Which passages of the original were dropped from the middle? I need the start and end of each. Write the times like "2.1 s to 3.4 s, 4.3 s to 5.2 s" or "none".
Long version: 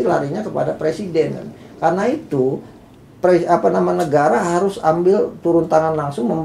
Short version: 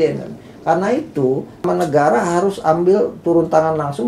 2.8 s to 3.8 s